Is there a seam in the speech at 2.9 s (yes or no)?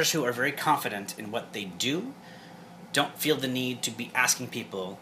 no